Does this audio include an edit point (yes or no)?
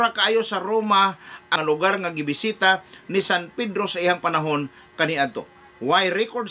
yes